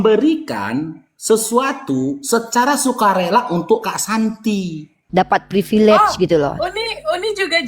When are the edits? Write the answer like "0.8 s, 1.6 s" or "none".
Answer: 4.9 s